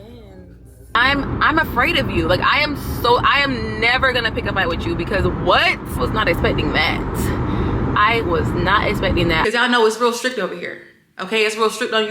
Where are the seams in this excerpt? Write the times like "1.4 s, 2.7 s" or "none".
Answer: 1.0 s, 6.0 s, 9.4 s